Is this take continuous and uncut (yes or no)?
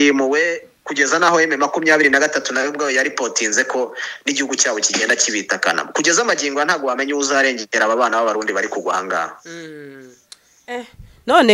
yes